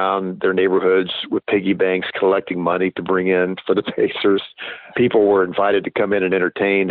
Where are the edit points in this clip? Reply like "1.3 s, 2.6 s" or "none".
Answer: 4.8 s